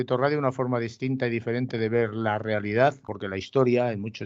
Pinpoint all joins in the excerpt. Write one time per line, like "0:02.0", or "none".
0:03.2